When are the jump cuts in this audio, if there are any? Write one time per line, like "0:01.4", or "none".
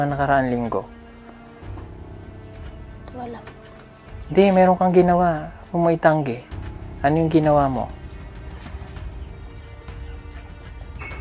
none